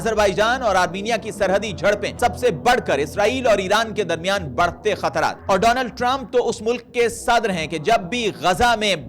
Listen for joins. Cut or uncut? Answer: cut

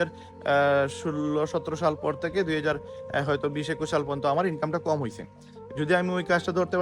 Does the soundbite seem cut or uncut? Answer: uncut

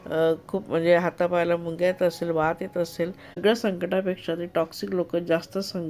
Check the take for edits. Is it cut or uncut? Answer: cut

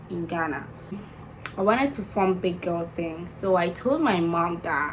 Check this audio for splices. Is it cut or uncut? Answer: cut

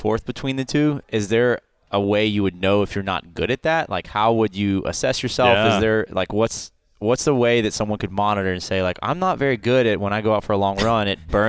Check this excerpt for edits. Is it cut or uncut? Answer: uncut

